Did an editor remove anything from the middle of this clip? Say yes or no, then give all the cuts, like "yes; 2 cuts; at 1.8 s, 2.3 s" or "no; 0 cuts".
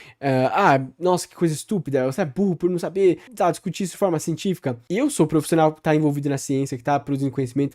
yes; 2 cuts; at 3.3 s, 4.8 s